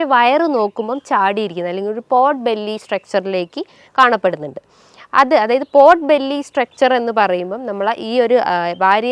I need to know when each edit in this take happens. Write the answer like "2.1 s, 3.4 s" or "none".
none